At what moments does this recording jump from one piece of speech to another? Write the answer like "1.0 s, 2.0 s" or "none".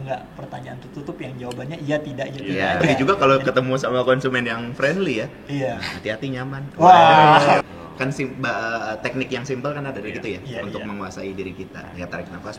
2.9 s, 7.6 s